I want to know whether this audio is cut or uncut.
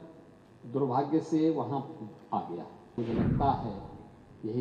cut